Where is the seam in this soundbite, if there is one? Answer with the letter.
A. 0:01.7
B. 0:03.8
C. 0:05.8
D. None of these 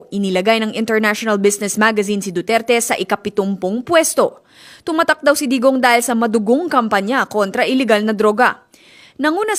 A